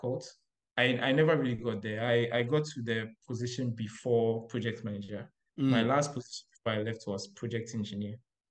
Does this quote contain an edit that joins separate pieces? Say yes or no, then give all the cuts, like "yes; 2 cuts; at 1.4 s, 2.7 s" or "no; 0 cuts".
no; 0 cuts